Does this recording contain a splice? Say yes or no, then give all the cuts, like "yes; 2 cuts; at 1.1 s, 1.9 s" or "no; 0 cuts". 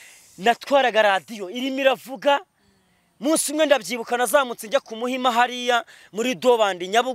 no; 0 cuts